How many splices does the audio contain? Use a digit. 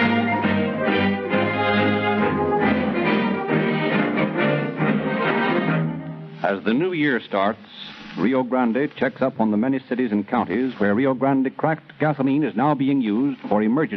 0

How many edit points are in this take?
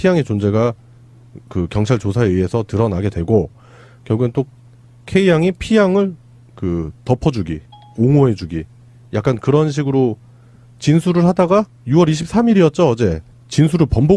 1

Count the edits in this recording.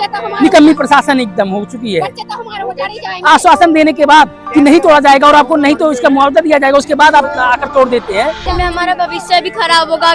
2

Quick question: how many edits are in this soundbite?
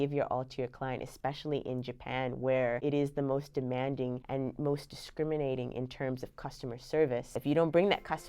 3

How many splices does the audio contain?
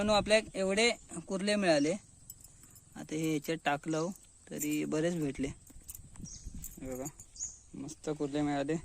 0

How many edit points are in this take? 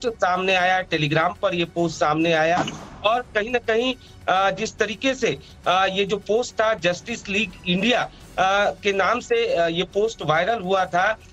0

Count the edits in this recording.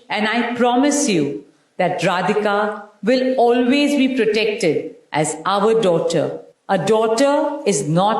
1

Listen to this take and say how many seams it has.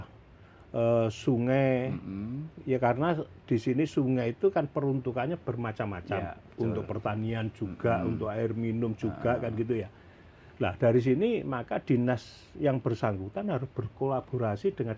0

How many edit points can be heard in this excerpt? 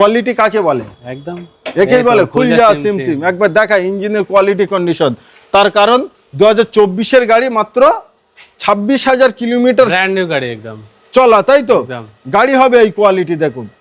0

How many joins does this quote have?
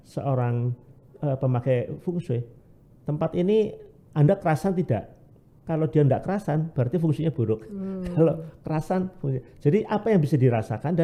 0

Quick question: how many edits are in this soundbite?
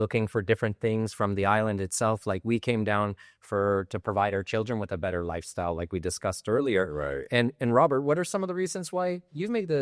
0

